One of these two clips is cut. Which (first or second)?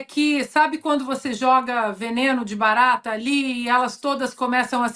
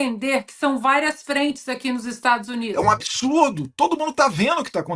second